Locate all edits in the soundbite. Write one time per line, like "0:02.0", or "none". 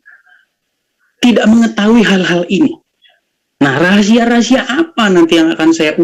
none